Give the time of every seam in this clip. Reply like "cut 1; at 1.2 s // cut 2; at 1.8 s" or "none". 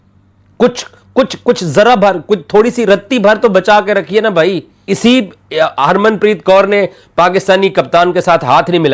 cut 1; at 4.7 s